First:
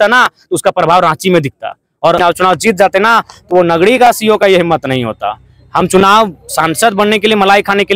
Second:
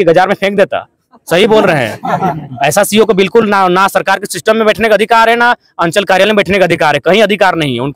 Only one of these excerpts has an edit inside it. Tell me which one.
first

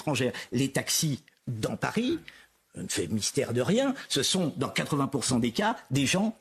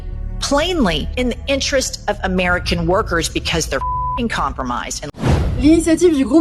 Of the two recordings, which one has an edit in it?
second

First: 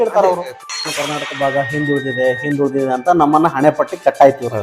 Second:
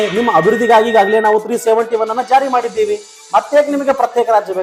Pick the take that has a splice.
first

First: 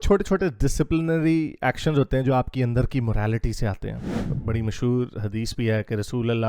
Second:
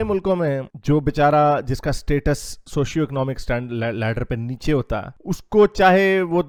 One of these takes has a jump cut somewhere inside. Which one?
first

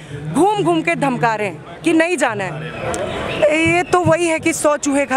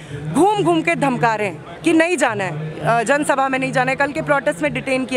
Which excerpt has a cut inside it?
first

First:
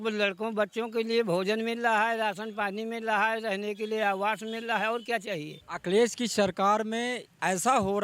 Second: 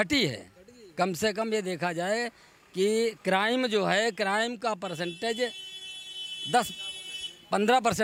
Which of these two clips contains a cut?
first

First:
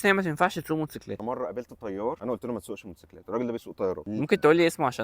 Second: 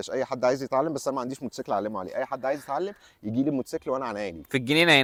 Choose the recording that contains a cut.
first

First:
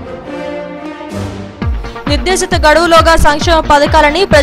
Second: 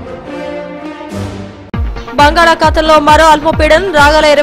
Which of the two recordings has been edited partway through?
second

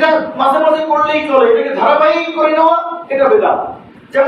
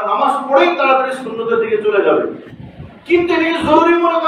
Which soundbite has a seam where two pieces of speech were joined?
second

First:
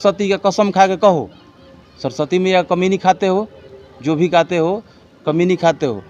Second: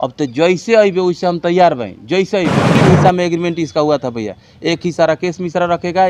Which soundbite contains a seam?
second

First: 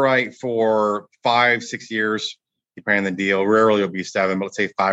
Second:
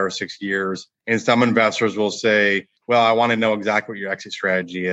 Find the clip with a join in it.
second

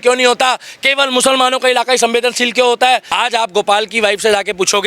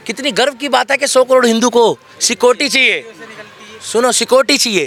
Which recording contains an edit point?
first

